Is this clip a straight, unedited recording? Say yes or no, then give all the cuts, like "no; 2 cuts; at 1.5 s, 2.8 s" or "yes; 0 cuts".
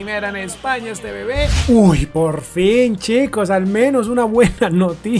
no; 1 cut; at 1.6 s